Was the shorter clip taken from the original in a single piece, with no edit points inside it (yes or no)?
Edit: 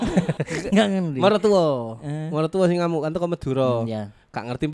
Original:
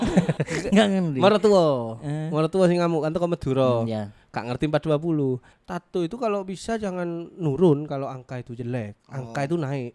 yes